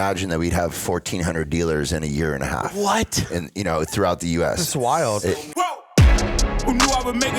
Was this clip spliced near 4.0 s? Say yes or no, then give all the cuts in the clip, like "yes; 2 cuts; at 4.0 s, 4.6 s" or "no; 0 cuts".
no; 1 cut; at 5.2 s